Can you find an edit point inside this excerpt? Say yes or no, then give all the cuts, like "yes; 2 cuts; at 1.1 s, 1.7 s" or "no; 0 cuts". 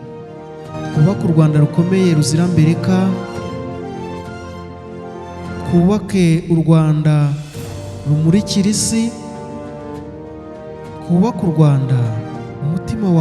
no; 0 cuts